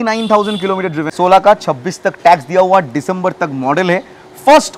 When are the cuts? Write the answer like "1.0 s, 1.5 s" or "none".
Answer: 1.1 s